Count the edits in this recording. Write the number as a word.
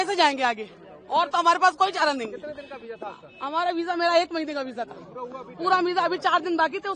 zero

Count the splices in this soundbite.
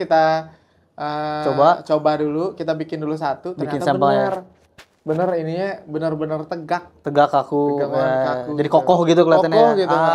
zero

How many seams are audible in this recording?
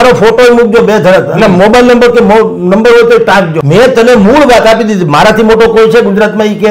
one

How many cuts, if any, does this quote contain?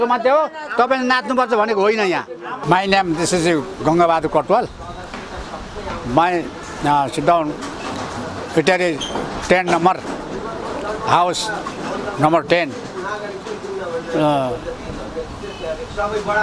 one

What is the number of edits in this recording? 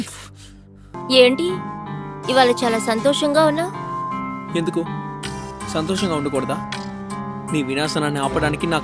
one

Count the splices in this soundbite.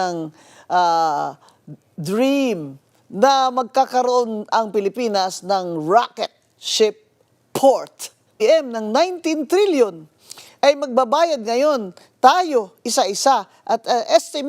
one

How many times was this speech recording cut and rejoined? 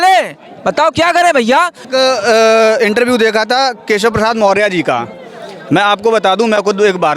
one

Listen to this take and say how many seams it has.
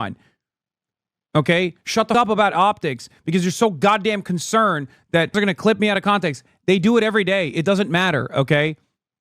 two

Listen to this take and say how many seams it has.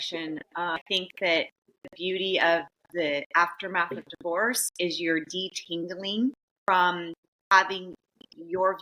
four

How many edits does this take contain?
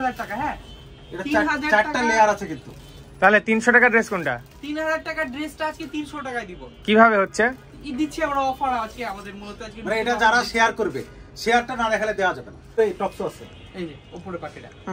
one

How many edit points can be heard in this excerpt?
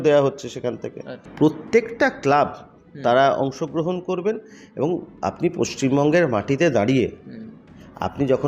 one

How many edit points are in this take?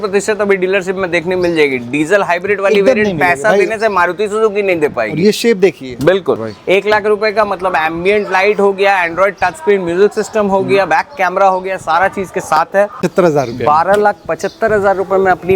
two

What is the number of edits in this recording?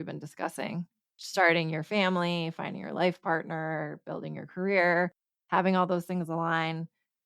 one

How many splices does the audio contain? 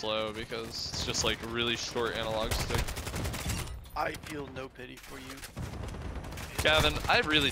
zero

